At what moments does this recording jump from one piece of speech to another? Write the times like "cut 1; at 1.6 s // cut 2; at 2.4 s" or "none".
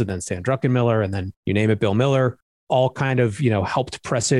none